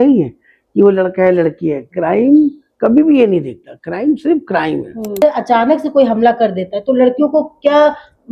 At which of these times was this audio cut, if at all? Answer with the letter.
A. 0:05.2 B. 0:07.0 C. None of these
A